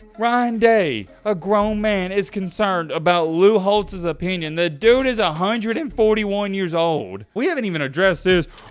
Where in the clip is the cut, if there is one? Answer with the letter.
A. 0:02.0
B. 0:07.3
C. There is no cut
B